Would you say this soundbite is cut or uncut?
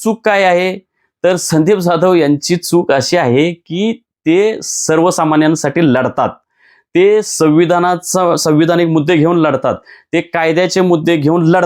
uncut